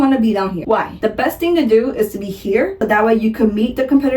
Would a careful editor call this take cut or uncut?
cut